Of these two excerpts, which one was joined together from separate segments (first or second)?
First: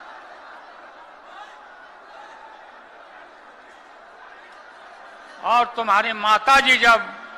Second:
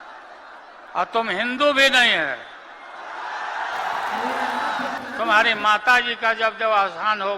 second